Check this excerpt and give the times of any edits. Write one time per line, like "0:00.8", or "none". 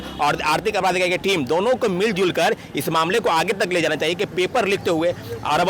none